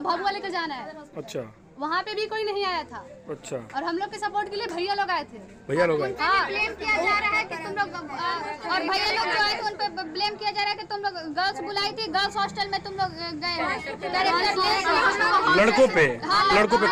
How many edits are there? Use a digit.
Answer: 0